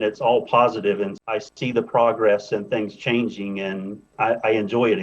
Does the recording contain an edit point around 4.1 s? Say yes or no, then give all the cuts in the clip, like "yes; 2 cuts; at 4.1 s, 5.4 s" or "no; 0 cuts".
yes; 1 cut; at 4.1 s